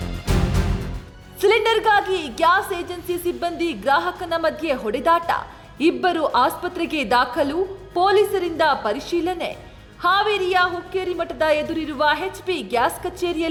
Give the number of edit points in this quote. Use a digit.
0